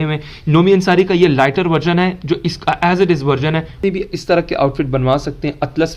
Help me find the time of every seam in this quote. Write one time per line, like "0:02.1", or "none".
0:03.8